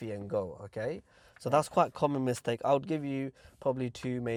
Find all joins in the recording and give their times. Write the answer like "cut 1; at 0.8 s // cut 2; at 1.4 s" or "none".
none

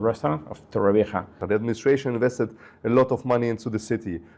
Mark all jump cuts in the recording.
cut 1; at 1.4 s

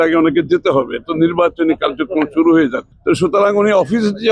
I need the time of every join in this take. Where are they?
cut 1; at 2.9 s

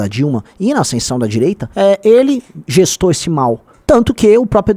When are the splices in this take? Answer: cut 1; at 1.7 s

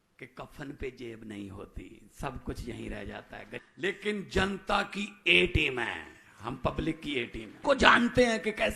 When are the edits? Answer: cut 1; at 3.6 s // cut 2; at 7.6 s

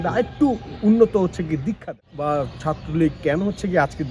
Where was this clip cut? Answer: cut 1; at 1.9 s

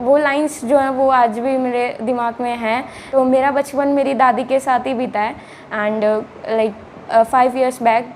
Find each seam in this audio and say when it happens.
cut 1; at 2.9 s

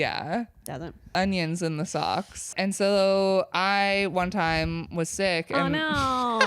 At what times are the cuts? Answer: cut 1; at 1.1 s // cut 2; at 2.5 s

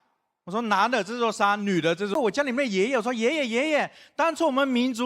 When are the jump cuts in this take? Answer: cut 1; at 2.2 s

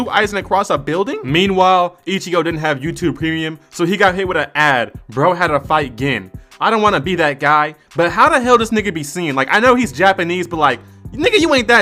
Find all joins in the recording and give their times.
none

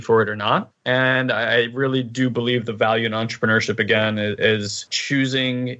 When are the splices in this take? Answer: cut 1; at 4.9 s

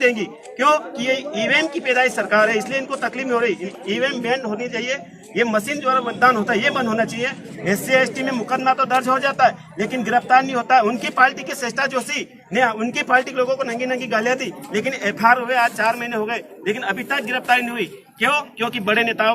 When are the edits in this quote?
cut 1; at 3.7 s // cut 2; at 7.5 s

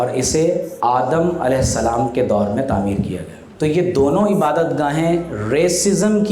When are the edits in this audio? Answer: cut 1; at 3.5 s

